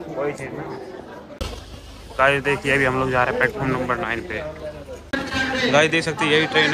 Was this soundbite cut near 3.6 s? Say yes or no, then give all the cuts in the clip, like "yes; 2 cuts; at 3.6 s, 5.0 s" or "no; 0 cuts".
no; 2 cuts; at 1.4 s, 4.9 s